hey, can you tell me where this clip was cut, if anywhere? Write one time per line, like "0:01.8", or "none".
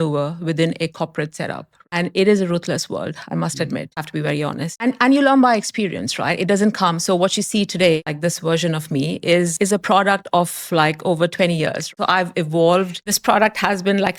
0:01.9
0:04.3
0:08.1
0:11.8
0:13.0